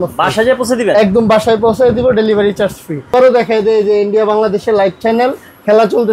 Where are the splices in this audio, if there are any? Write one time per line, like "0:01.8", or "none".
0:03.1